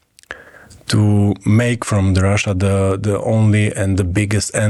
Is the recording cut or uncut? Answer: uncut